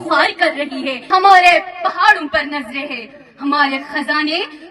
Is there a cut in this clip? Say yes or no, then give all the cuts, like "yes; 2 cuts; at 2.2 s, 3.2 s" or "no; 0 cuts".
yes; 1 cut; at 1.0 s